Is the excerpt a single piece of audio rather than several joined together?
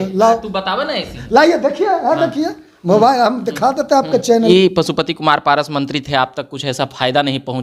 no; 1 cut; at 4.5 s

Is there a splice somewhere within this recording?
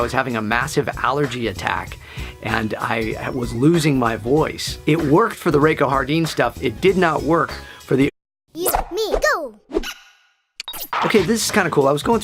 no; 0 cuts

